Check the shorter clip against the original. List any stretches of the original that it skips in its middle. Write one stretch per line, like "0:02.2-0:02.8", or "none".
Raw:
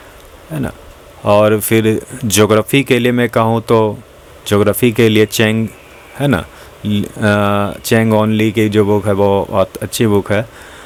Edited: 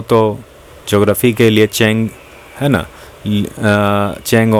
none